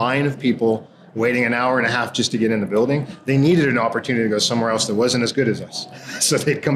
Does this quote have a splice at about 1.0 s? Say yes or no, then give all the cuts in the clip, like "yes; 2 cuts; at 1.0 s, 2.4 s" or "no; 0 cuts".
no; 0 cuts